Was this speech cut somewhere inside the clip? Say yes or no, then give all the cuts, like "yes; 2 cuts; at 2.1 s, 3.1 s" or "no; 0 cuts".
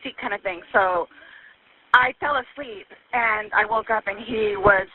no; 0 cuts